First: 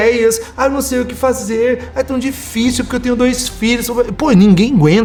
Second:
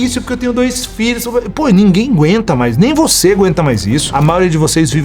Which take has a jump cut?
second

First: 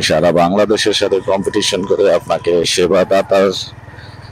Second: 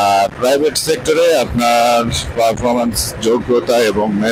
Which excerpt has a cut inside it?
first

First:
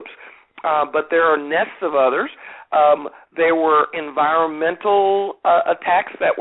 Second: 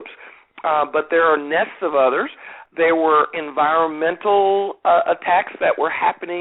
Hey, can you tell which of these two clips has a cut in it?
second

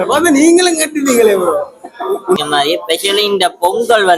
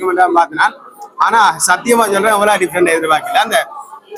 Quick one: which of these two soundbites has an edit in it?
first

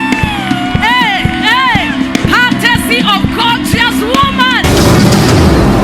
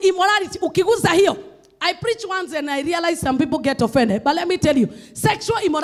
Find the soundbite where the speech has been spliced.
first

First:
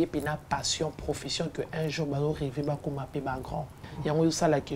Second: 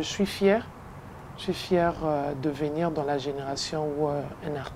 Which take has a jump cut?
first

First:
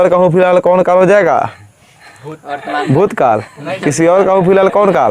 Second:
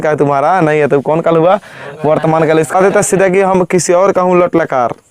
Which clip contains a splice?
second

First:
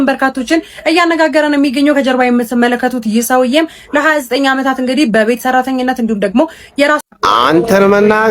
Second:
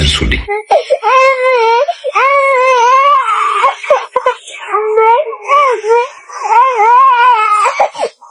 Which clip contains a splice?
first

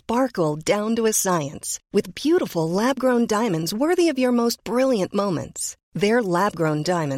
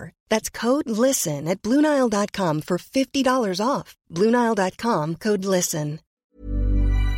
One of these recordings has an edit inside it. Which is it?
second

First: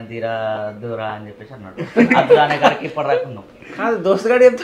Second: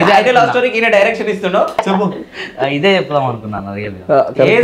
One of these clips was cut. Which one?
second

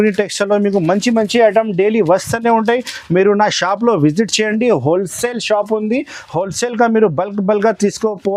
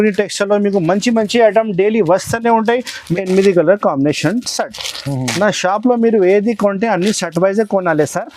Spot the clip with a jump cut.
second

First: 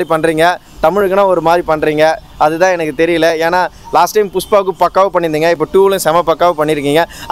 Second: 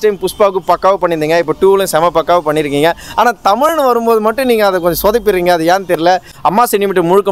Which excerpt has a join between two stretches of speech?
second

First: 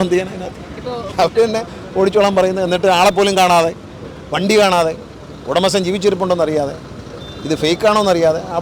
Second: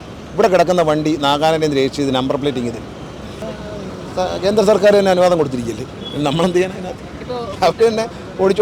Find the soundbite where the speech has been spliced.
second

